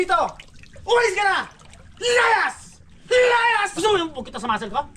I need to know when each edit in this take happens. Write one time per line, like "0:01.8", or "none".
0:03.7